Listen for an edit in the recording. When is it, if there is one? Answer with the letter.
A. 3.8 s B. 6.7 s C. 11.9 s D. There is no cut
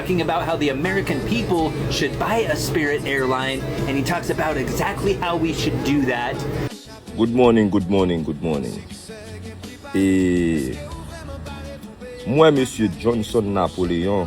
B